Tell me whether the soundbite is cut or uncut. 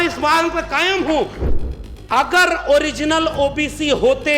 cut